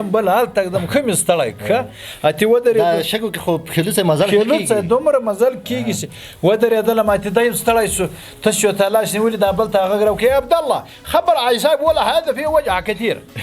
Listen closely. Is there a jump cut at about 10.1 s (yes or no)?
no